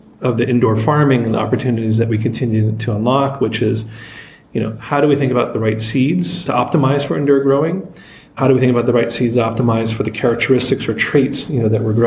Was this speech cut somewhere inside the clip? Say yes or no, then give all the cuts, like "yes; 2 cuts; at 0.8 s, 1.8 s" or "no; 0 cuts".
yes; 1 cut; at 6.4 s